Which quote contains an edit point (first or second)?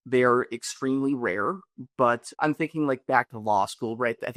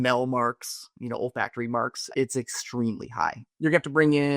second